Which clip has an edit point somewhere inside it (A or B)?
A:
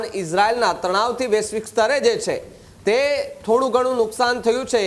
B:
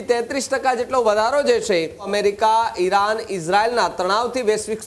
B